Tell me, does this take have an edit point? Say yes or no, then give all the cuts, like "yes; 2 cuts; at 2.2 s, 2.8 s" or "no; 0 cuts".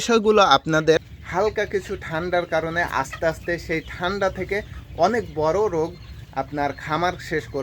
yes; 1 cut; at 1.2 s